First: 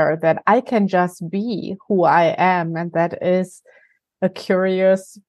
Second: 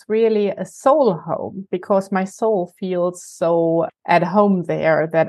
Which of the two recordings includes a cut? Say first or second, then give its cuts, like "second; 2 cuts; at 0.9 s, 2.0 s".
second; 1 cut; at 4.0 s